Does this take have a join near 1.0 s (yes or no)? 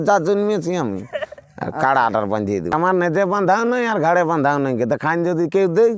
no